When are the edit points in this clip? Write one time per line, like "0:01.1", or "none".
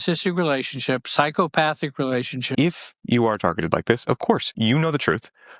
0:02.4
0:04.6